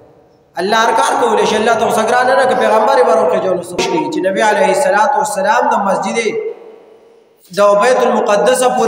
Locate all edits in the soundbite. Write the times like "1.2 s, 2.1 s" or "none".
3.8 s